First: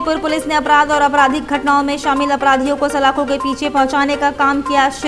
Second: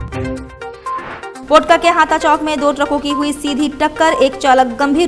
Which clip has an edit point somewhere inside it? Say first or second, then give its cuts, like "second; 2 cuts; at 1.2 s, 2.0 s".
second; 1 cut; at 1.3 s